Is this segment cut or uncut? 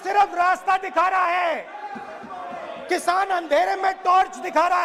uncut